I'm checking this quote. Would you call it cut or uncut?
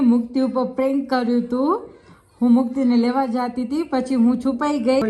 uncut